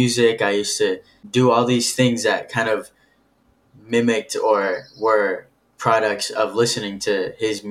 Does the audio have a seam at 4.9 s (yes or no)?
no